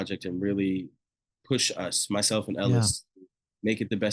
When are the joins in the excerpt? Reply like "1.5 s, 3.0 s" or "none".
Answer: none